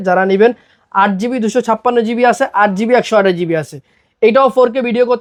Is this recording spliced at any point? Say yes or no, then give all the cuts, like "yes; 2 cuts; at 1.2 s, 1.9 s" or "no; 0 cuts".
no; 0 cuts